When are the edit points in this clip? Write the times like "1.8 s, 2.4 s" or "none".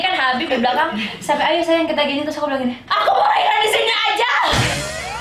none